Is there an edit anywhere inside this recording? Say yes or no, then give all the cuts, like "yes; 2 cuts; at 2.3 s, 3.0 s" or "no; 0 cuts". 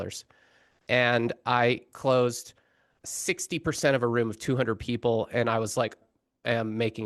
no; 0 cuts